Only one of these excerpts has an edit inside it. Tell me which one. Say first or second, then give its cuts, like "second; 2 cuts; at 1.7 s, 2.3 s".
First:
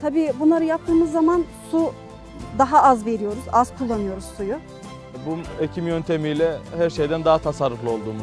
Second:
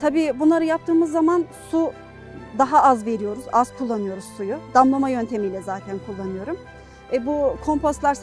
first; 1 cut; at 4.6 s